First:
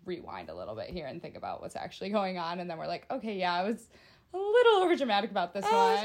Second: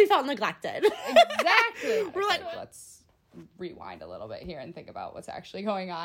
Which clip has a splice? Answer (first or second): second